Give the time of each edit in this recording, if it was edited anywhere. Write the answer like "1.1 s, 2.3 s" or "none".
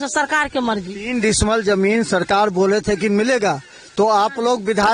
none

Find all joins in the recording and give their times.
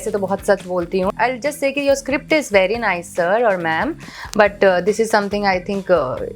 1.1 s

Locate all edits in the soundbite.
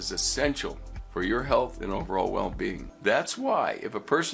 2.9 s

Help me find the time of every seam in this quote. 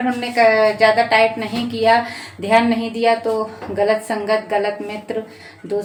none

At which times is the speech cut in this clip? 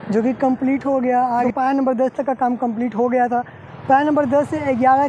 1.5 s

